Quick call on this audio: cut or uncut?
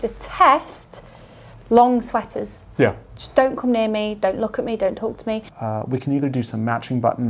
cut